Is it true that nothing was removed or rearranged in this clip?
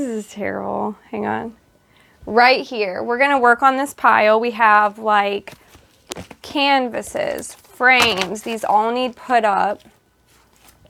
yes; 0 cuts

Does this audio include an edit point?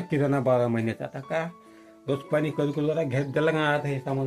no; 0 cuts

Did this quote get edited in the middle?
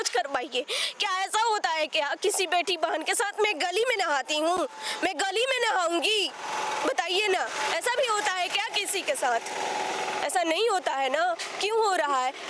no; 0 cuts

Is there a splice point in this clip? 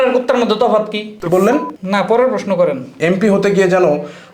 yes; 1 cut; at 2.9 s

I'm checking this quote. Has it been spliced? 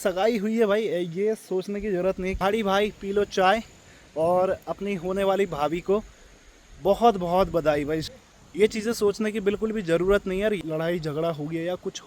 yes; 3 cuts; at 2.4 s, 8.1 s, 10.6 s

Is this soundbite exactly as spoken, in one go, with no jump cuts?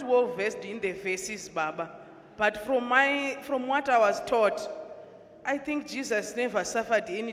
yes; 0 cuts

